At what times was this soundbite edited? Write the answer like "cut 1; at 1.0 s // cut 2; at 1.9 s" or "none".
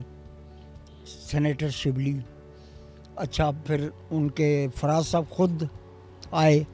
none

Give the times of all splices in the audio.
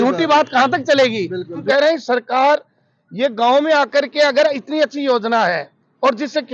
cut 1; at 1.6 s

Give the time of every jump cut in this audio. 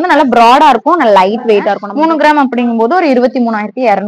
cut 1; at 1.9 s

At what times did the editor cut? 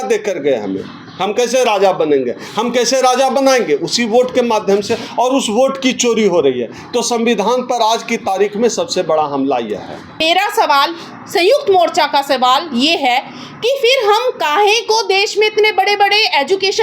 cut 1; at 10.2 s

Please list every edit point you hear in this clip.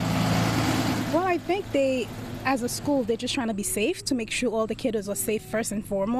cut 1; at 1.1 s

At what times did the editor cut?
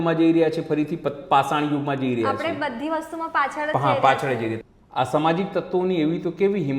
cut 1; at 4.6 s

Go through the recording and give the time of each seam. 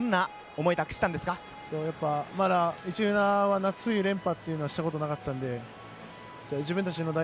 none

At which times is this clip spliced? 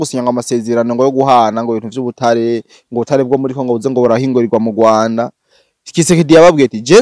none

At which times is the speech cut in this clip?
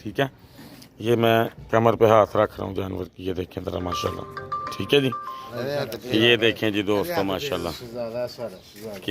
cut 1; at 5.4 s

